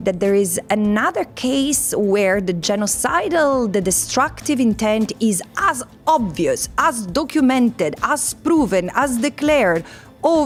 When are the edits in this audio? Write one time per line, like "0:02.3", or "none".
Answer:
none

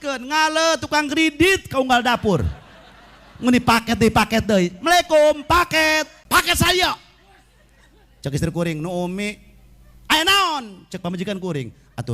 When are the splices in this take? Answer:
0:06.2

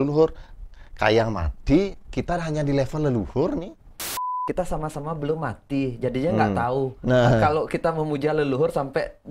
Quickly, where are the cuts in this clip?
0:04.2

